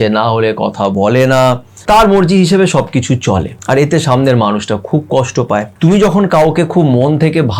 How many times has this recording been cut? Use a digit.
3